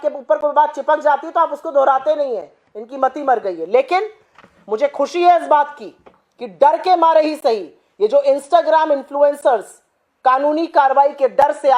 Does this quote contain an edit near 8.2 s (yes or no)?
no